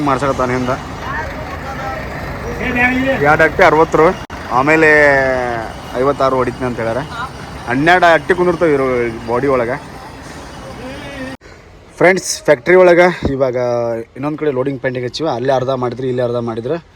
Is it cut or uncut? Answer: uncut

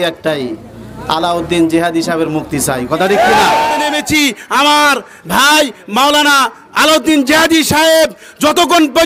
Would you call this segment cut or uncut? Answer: cut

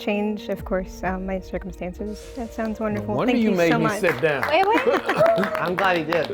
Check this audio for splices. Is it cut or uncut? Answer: cut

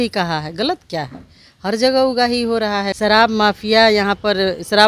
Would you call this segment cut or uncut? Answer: cut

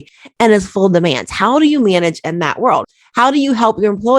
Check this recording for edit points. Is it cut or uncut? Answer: cut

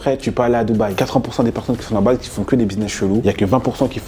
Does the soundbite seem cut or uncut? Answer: cut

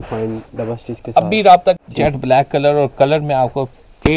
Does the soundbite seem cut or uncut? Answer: cut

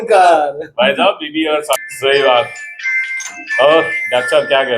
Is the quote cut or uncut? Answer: cut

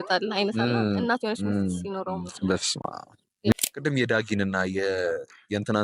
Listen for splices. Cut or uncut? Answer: cut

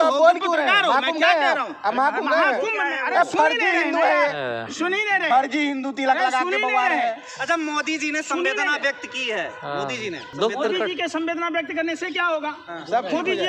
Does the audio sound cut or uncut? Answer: uncut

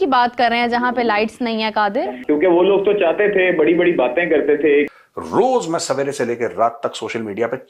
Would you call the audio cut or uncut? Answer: cut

